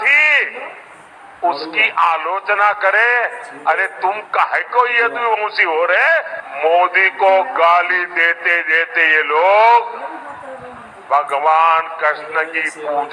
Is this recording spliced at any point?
yes; 1 cut; at 6.4 s

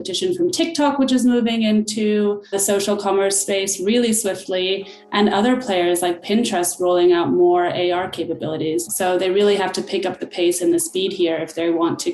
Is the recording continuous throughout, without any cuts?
no; 2 cuts; at 2.6 s, 8.9 s

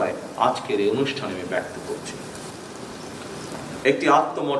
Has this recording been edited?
no; 0 cuts

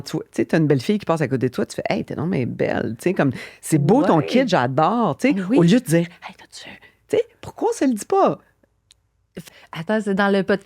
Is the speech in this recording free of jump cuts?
yes; 0 cuts

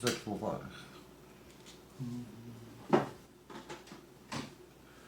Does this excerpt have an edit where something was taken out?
no; 0 cuts

